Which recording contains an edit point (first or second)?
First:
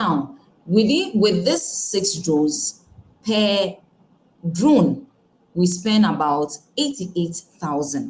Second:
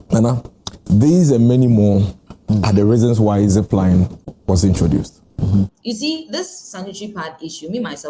second